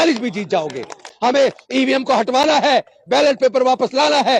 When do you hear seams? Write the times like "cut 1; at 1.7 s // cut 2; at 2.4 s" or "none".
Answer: cut 1; at 1.1 s